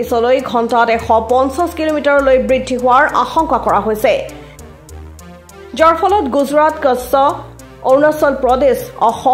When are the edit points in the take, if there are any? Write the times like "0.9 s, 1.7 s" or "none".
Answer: 4.3 s, 5.7 s

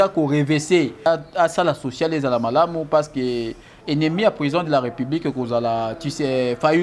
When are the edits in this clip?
1.1 s

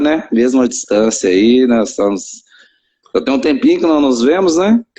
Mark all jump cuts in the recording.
1.6 s

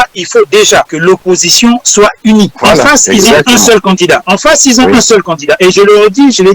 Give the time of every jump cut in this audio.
0.9 s, 2.5 s, 4.3 s

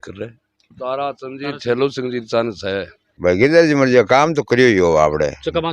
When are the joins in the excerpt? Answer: 3.0 s

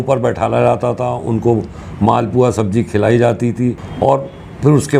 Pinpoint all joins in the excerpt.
3.9 s

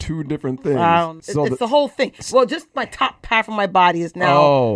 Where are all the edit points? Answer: 1.2 s

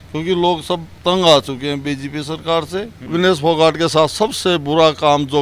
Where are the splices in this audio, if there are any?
0.9 s, 3.0 s

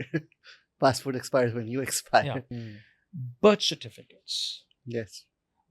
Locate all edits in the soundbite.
2.6 s

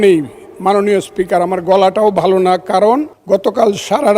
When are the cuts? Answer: 3.1 s

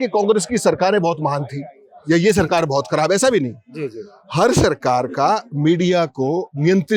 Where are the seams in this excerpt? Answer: none

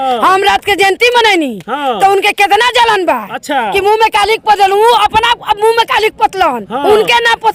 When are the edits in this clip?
none

